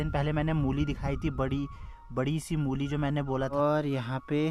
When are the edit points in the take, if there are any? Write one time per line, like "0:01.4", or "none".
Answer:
0:03.5

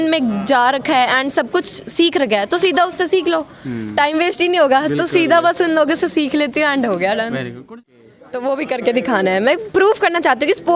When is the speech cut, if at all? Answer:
0:07.9

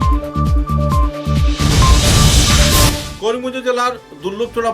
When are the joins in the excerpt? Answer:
0:03.0

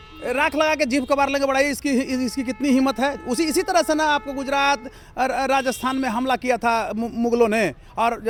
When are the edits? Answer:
none

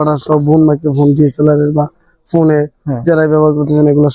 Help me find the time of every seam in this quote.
none

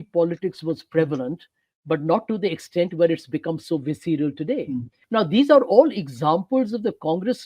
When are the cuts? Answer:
0:04.9

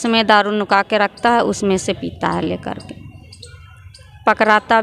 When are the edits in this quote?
none

